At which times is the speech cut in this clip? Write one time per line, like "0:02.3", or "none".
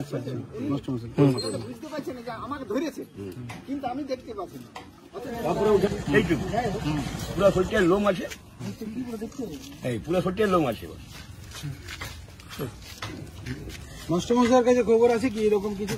0:05.9